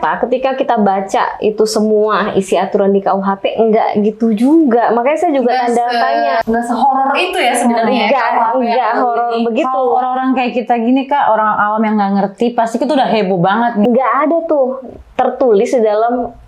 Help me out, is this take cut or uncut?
cut